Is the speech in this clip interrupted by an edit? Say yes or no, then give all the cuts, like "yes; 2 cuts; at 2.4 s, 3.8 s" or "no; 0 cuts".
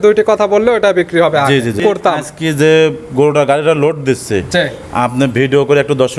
yes; 1 cut; at 1.8 s